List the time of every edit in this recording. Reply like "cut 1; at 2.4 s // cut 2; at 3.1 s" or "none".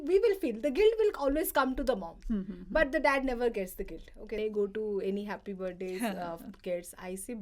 cut 1; at 4.4 s